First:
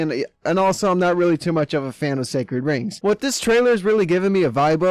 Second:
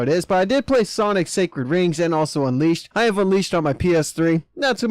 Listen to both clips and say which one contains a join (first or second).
second